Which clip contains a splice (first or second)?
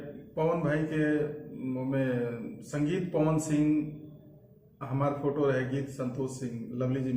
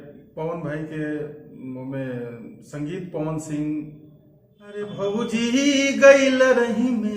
second